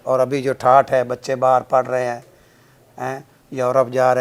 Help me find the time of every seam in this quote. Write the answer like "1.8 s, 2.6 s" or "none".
none

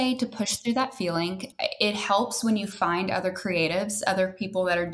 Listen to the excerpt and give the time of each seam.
1.5 s

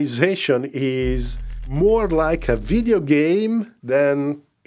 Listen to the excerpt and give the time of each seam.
3.8 s

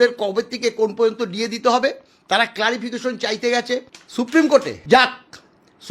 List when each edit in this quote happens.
4.0 s, 4.7 s

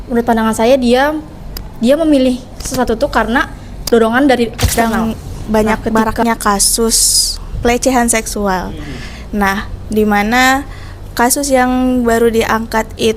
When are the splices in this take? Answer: 4.7 s

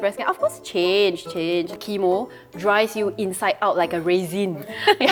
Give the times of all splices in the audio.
none

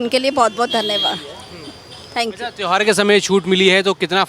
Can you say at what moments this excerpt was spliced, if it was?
none

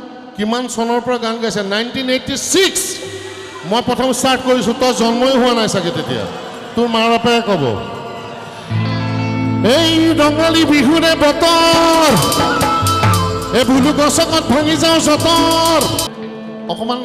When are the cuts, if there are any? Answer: 16.1 s

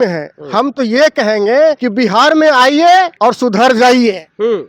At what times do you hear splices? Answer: 1.8 s, 3.1 s

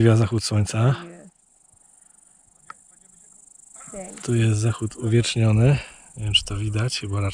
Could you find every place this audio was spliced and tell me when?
none

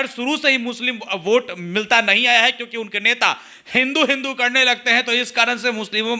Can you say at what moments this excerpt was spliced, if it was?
none

